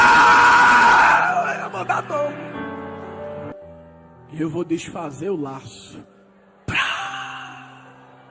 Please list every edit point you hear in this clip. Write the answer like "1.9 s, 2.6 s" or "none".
3.2 s